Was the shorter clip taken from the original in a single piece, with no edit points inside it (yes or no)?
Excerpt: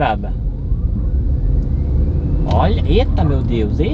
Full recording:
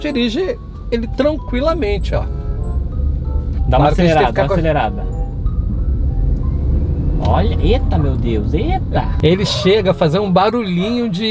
yes